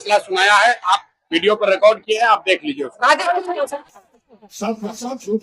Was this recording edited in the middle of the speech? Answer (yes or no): yes